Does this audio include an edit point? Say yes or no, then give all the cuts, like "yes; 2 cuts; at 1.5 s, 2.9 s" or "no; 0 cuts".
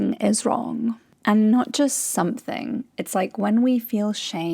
yes; 1 cut; at 1.1 s